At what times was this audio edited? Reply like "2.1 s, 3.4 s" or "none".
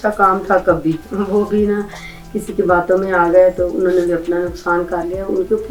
none